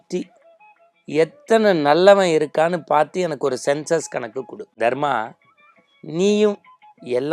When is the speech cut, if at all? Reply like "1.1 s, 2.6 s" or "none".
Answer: 4.6 s